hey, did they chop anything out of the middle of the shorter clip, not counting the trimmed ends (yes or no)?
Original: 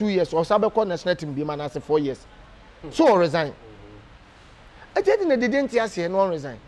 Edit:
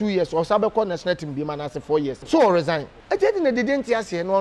yes